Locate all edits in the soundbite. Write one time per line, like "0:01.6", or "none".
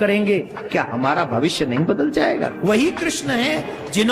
0:02.5